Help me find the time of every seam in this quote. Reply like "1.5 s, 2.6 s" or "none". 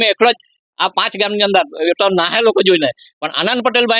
none